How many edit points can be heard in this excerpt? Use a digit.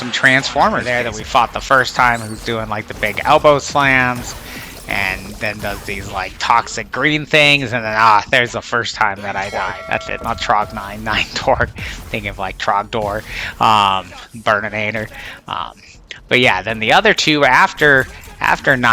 2